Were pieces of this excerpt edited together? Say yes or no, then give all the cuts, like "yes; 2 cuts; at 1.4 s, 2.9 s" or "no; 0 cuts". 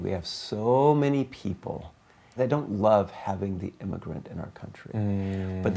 yes; 1 cut; at 2.2 s